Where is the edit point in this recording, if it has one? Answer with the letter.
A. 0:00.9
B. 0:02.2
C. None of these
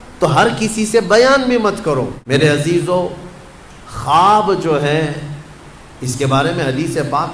B